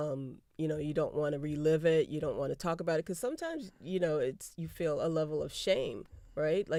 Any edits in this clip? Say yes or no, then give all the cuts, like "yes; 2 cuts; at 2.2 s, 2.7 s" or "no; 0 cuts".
no; 0 cuts